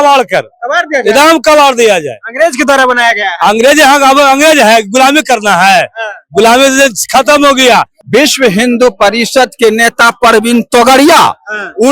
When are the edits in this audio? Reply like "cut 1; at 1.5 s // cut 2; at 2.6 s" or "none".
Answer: cut 1; at 8.0 s